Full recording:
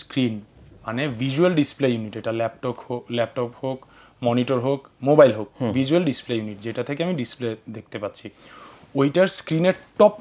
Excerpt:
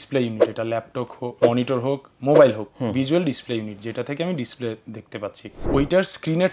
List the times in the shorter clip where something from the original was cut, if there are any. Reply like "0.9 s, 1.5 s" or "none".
1.3 s, 5.5 s